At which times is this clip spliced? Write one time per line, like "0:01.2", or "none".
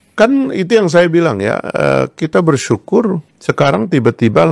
0:03.3